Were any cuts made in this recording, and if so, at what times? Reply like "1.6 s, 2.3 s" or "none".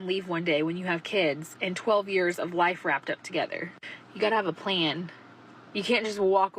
2.3 s